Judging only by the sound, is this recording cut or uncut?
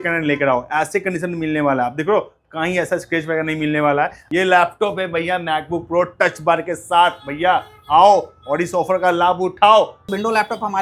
cut